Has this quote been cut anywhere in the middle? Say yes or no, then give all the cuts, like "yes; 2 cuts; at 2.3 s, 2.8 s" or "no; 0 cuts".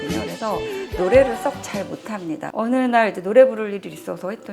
yes; 1 cut; at 2.5 s